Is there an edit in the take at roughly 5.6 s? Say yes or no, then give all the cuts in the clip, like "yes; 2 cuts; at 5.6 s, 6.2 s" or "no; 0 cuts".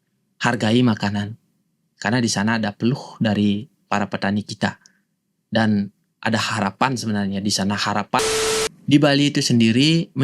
no; 1 cut; at 8.3 s